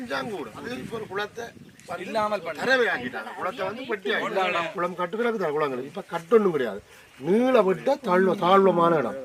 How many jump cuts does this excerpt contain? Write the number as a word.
two